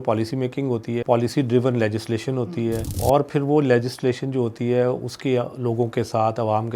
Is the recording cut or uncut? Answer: cut